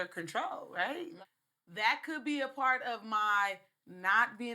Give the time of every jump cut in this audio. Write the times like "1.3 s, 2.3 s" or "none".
1.1 s